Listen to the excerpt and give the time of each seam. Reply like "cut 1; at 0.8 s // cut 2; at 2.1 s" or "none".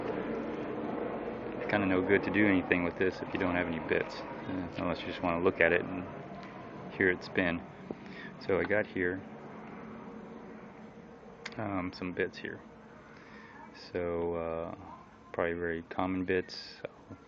cut 1; at 9.9 s